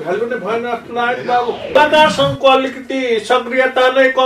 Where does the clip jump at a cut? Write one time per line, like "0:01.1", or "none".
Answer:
0:01.8